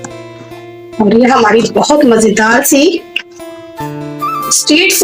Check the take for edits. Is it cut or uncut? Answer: cut